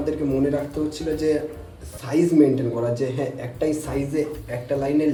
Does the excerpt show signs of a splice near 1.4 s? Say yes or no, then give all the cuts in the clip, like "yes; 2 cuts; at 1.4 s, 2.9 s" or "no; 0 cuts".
no; 0 cuts